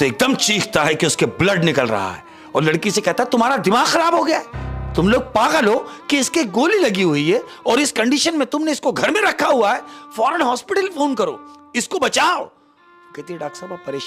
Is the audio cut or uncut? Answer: uncut